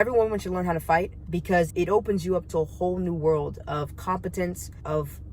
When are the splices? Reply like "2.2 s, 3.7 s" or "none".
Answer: 1.7 s